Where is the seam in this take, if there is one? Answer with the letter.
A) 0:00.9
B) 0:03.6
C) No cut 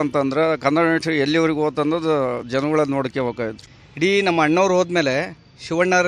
B